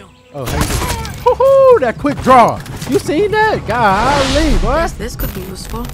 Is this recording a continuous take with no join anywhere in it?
yes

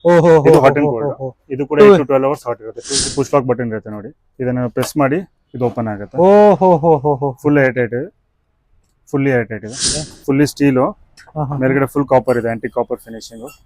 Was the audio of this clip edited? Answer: yes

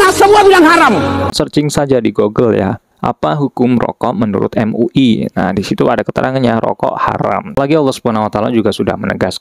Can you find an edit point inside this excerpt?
yes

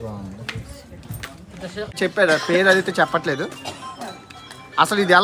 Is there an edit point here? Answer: yes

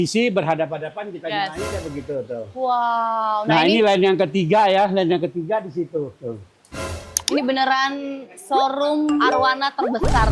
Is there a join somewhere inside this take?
no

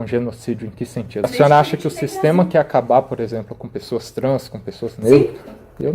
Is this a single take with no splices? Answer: no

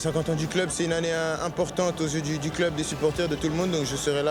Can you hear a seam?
no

